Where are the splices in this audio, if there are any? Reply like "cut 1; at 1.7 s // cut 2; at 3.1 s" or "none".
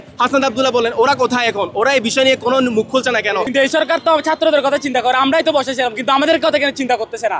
cut 1; at 3.4 s

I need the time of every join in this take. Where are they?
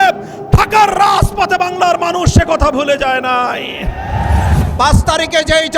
cut 1; at 4.5 s

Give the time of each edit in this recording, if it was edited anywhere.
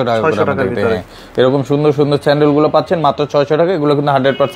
none

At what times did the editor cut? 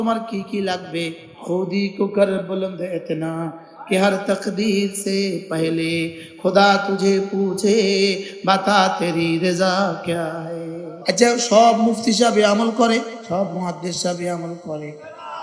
cut 1; at 1.3 s // cut 2; at 10.9 s // cut 3; at 13.2 s

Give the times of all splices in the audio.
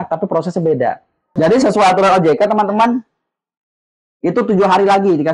cut 1; at 1.3 s

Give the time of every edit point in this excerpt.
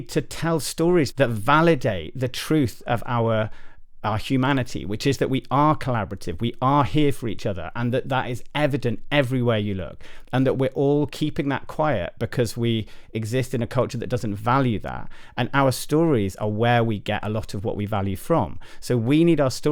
cut 1; at 1.1 s

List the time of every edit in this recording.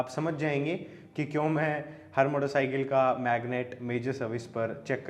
none

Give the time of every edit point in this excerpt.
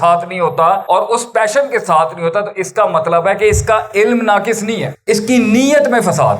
cut 1; at 0.8 s // cut 2; at 4.9 s

